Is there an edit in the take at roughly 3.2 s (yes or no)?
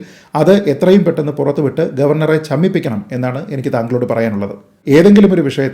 no